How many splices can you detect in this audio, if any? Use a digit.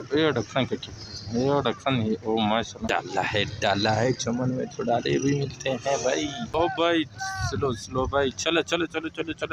2